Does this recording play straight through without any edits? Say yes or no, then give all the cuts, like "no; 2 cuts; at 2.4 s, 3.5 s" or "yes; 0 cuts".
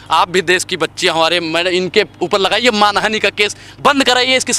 yes; 0 cuts